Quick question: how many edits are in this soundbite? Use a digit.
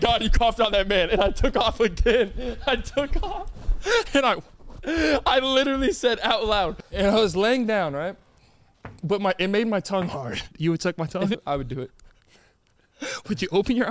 3